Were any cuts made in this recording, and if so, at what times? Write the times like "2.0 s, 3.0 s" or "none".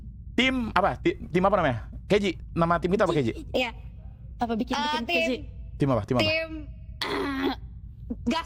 none